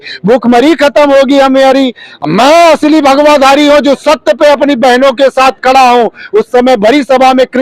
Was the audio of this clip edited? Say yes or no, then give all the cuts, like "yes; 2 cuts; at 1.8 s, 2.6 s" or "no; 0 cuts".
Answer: yes; 1 cut; at 2.1 s